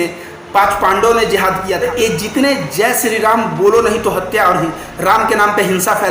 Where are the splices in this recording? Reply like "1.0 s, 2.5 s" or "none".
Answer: 1.8 s